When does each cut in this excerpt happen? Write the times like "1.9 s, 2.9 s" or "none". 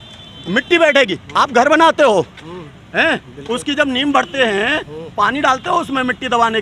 none